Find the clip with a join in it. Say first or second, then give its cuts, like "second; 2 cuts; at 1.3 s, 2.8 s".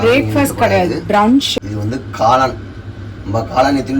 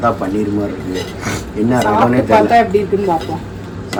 first; 1 cut; at 1.5 s